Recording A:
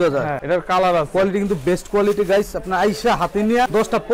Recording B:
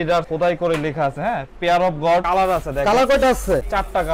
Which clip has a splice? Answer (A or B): B